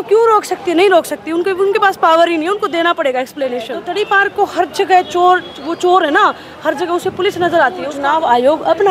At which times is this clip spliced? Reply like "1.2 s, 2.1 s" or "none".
3.8 s, 7.9 s